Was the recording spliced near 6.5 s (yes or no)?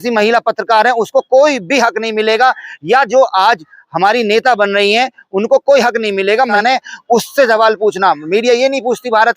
yes